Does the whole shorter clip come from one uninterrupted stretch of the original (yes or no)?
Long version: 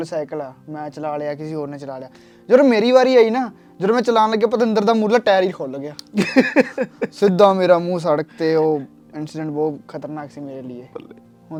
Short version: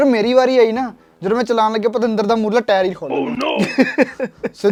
yes